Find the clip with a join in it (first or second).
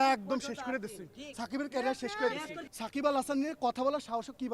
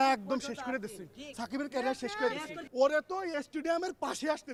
first